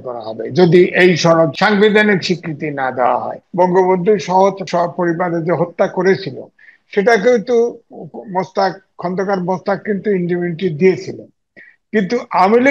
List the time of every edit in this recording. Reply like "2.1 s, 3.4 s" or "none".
1.5 s, 3.4 s, 4.6 s